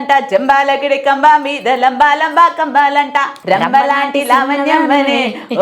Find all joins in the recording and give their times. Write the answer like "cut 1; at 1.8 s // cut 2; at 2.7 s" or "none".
cut 1; at 3.3 s